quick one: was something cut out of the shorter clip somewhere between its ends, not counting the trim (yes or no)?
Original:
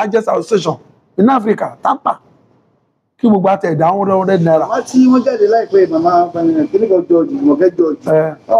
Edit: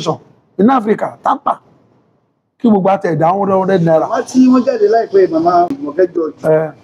yes